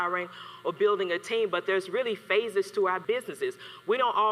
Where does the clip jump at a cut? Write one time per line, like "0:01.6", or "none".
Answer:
0:03.0